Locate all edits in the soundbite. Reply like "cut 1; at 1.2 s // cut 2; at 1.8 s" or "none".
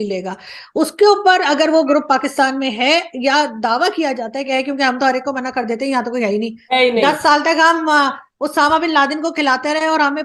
none